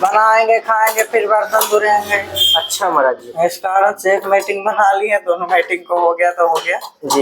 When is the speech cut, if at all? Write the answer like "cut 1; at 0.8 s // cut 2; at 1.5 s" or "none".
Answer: none

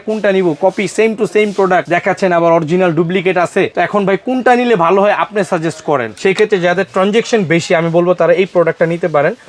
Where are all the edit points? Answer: cut 1; at 1.9 s // cut 2; at 3.7 s // cut 3; at 6.1 s

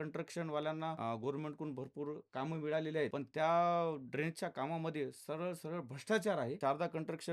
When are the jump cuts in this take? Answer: cut 1; at 1.0 s // cut 2; at 3.1 s // cut 3; at 6.6 s

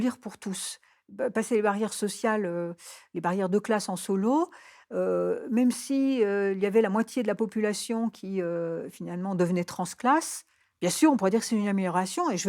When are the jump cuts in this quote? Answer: none

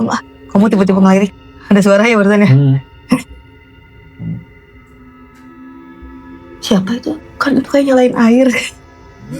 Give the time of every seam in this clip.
cut 1; at 7.2 s

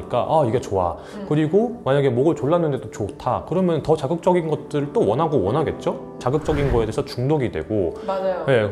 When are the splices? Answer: none

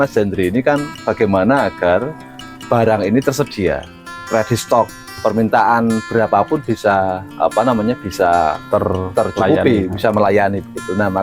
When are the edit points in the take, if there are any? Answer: cut 1; at 5.2 s

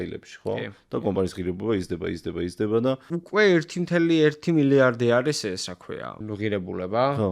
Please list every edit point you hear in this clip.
cut 1; at 3.0 s // cut 2; at 6.2 s

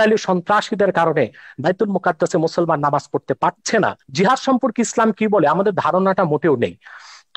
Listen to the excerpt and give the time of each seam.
cut 1; at 4.0 s

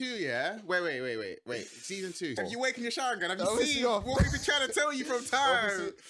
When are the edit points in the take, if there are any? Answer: cut 1; at 2.4 s

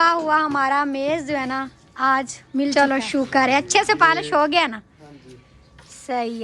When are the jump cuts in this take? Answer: cut 1; at 2.7 s

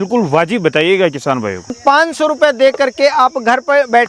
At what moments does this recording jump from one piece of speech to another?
cut 1; at 1.8 s

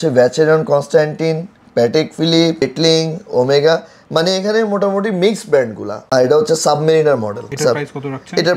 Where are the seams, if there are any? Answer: cut 1; at 6.0 s

